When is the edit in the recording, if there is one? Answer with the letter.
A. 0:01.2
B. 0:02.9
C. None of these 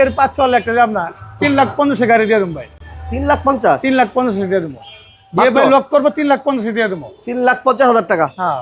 C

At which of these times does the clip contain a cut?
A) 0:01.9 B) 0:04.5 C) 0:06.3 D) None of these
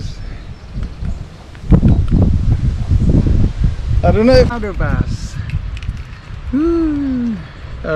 B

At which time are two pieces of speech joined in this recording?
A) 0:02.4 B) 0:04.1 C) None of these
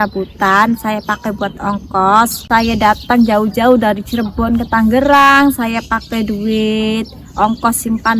A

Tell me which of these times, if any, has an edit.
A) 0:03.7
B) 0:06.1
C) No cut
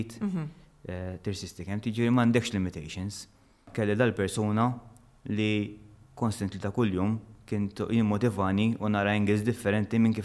A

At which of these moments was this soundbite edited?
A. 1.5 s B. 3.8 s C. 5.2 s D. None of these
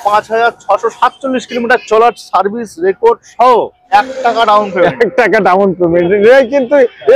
B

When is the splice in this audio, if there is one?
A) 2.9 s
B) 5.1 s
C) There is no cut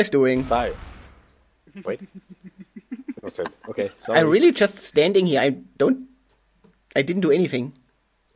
B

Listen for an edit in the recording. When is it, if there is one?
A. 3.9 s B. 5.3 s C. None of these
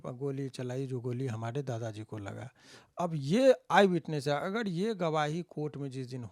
C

